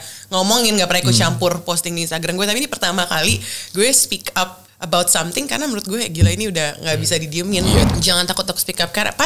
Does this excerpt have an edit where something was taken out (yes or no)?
yes